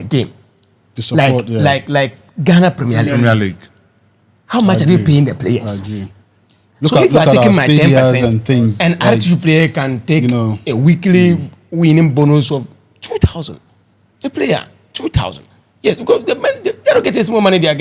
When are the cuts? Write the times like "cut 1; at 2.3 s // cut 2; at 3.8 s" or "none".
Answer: none